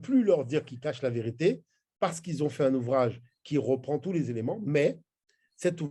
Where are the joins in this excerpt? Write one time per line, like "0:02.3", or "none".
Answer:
none

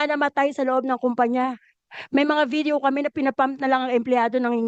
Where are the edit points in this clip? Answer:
none

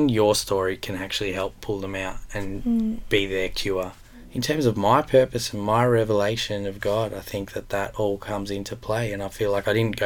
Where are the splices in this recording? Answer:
0:04.3

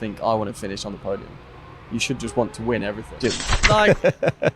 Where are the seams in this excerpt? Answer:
0:03.2

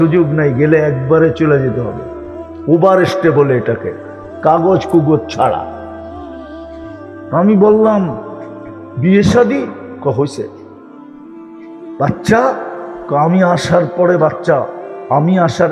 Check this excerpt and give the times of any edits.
none

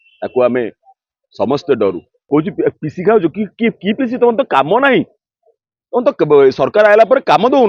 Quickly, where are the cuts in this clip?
0:02.2

